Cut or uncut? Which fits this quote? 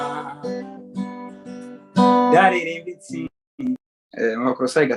cut